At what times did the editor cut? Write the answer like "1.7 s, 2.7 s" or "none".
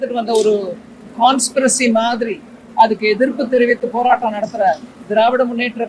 4.9 s